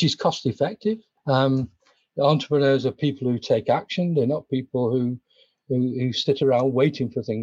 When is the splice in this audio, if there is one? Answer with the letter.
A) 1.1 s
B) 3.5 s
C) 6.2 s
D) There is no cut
A